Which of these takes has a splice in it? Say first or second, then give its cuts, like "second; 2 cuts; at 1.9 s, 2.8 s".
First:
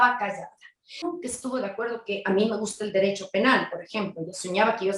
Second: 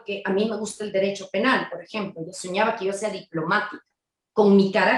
first; 1 cut; at 1.1 s